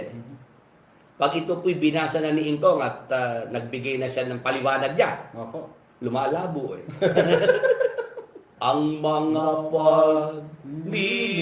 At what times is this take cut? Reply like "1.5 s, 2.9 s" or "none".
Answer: 8.5 s